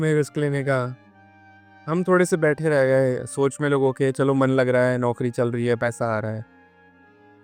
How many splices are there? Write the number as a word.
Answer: zero